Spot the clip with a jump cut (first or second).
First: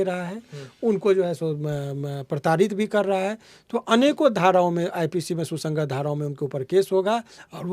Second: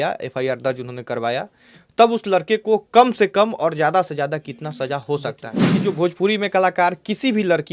second